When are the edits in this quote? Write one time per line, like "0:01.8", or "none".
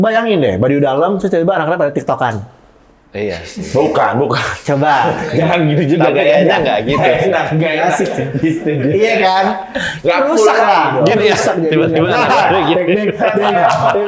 none